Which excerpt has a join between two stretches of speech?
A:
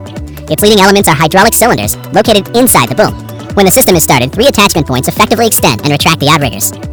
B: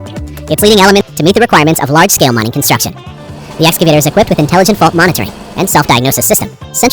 B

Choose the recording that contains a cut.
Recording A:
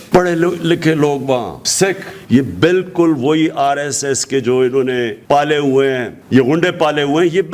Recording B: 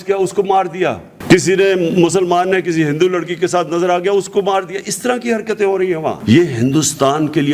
A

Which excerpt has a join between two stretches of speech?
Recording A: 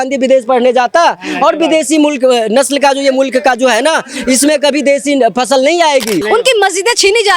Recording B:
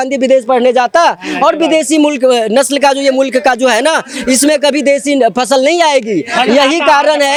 A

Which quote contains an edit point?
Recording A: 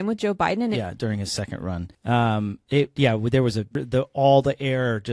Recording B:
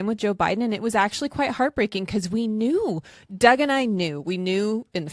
A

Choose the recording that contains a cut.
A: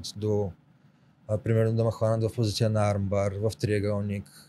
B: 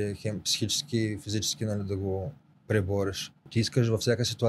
B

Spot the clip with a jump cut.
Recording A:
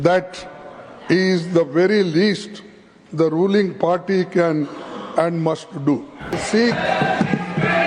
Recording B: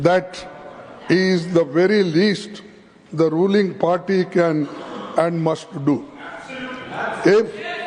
A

